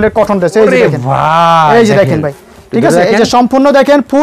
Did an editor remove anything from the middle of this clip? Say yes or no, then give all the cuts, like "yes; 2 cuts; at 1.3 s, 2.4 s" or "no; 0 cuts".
no; 0 cuts